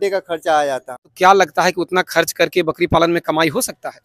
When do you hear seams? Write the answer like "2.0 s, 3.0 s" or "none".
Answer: 1.1 s